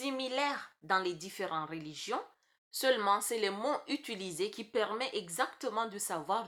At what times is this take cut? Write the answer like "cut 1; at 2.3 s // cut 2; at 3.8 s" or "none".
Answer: none